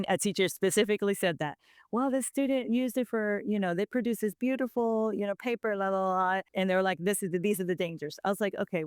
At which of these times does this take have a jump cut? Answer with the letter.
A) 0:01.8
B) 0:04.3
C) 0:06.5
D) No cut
C